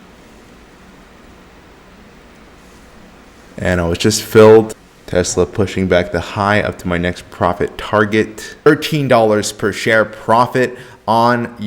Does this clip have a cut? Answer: yes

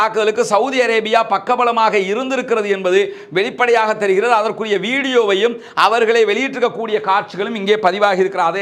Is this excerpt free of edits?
yes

